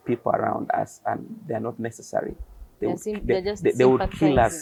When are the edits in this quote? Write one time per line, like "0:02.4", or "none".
none